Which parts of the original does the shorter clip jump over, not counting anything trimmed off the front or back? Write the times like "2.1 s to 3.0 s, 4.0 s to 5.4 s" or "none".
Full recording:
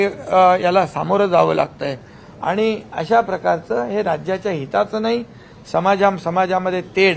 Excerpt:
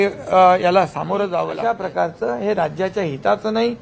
1.5 s to 3.0 s

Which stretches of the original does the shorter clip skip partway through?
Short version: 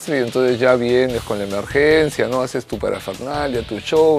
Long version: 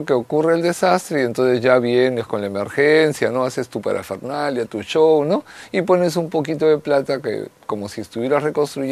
none

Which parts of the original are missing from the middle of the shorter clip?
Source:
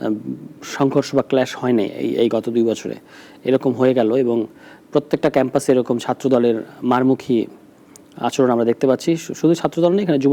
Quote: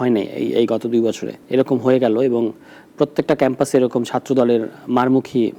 2.9 s to 3.3 s

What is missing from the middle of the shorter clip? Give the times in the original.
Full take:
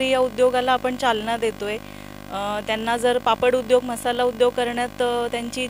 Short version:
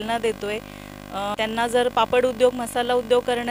2.5 s to 2.6 s

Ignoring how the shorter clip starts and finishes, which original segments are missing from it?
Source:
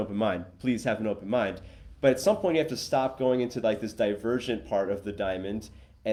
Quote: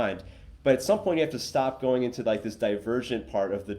none

